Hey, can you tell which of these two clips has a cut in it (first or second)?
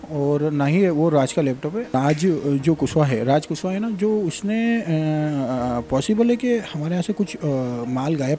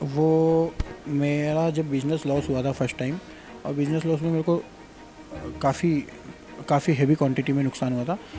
first